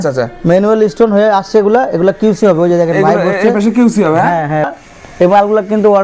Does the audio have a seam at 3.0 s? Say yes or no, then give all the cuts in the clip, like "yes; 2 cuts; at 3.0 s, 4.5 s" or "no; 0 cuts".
no; 1 cut; at 4.7 s